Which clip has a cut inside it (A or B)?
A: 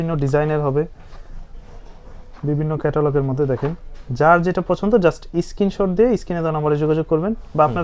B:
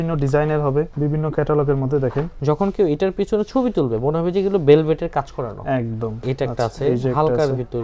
B